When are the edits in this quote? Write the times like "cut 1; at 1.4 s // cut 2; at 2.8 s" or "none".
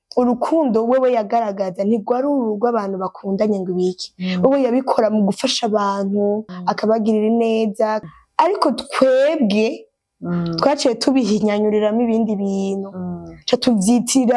cut 1; at 6.5 s // cut 2; at 8.0 s